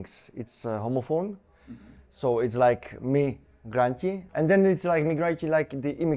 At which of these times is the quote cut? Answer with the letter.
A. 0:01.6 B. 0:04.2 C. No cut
B